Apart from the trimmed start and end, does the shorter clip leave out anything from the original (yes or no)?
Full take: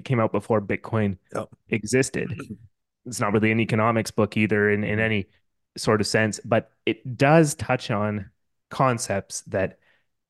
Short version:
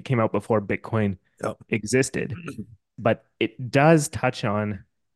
yes